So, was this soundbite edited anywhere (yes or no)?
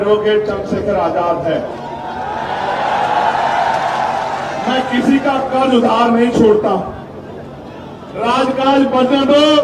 no